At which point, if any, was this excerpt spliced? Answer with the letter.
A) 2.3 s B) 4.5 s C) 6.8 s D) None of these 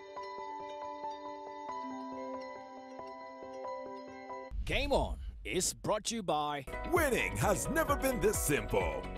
B